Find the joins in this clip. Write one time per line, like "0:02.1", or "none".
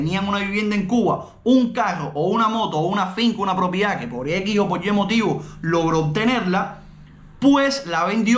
none